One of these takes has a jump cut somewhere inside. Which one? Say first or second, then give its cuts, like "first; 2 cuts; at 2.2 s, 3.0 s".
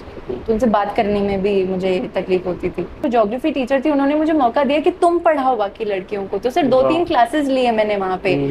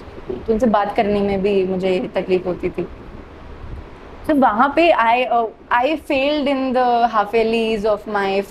first; 1 cut; at 3.0 s